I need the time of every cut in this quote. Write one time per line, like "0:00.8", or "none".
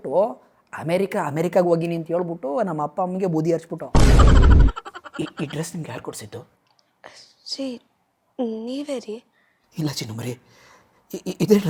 0:04.7

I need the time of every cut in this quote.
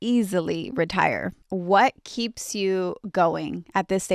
0:01.4

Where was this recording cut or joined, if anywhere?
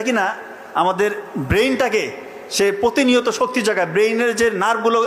none

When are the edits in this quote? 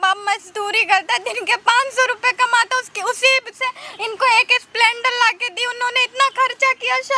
none

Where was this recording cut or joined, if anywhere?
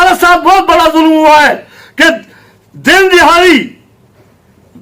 none

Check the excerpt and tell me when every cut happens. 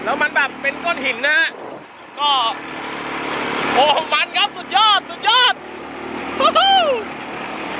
none

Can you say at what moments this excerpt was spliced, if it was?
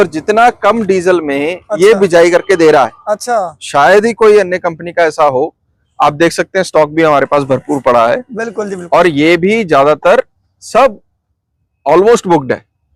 none

